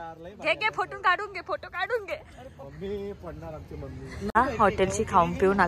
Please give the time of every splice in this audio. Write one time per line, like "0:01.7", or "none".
0:04.4